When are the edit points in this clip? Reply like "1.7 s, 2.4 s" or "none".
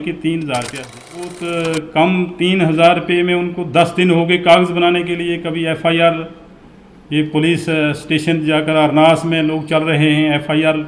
1.4 s